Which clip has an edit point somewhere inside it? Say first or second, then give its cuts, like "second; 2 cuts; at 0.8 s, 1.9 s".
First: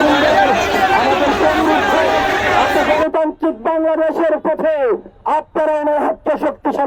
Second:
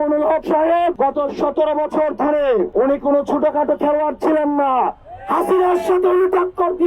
second; 2 cuts; at 0.9 s, 2.7 s